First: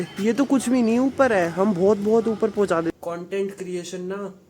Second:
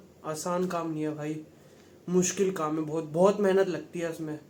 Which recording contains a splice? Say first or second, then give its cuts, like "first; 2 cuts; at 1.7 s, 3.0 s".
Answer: first; 1 cut; at 2.9 s